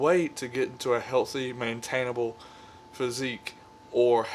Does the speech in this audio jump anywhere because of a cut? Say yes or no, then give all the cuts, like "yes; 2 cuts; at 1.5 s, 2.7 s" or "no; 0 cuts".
no; 0 cuts